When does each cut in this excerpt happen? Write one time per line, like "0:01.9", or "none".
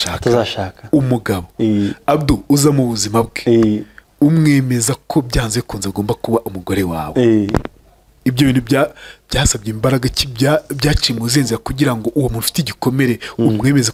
none